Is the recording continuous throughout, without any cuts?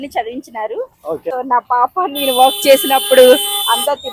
no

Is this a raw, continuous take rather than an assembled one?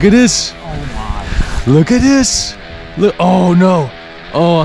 yes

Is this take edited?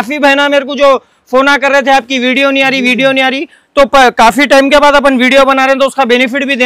no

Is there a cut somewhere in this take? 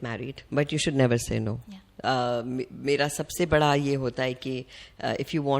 no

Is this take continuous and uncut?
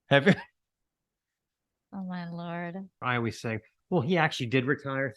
no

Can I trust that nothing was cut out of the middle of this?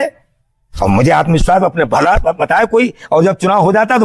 yes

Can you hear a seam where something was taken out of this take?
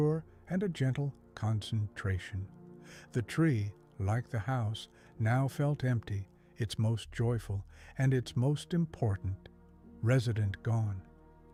no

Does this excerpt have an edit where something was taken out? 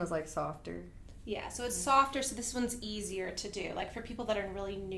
no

